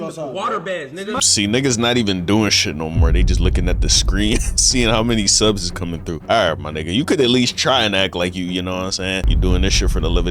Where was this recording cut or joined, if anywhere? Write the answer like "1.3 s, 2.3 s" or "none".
6.2 s, 9.3 s